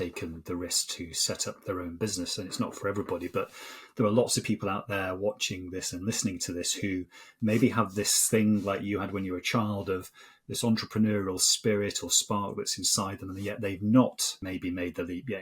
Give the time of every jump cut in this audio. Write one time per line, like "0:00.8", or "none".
0:14.3